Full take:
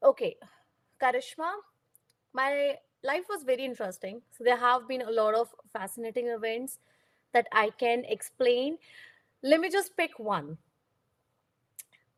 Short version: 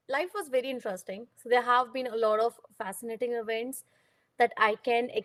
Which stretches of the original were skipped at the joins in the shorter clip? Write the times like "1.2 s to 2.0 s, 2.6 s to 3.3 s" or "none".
none